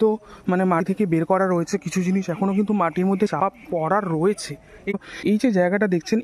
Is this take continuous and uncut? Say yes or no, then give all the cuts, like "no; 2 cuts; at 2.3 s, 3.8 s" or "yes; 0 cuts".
no; 1 cut; at 4.9 s